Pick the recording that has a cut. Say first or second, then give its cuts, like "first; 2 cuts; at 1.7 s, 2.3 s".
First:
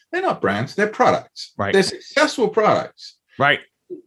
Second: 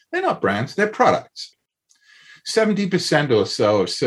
second; 1 cut; at 1.6 s